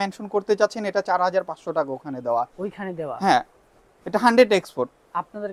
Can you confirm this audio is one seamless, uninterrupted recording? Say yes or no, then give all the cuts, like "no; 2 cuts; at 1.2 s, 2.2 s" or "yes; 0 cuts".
yes; 0 cuts